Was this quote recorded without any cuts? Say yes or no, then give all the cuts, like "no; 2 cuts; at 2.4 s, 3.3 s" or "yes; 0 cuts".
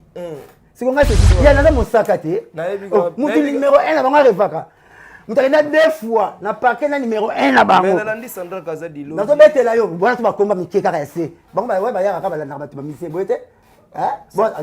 no; 1 cut; at 1.2 s